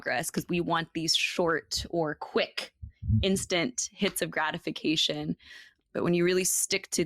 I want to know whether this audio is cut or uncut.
cut